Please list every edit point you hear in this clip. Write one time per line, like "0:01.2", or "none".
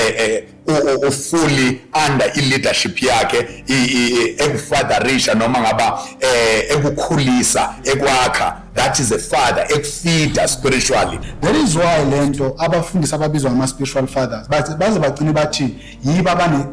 0:11.2